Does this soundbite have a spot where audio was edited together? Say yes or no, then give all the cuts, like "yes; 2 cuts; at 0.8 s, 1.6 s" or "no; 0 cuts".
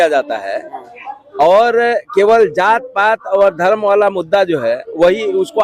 no; 0 cuts